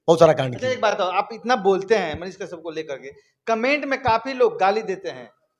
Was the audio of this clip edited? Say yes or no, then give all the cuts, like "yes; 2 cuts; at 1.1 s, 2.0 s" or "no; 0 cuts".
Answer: no; 0 cuts